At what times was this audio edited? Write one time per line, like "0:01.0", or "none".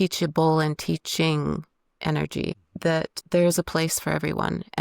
0:03.2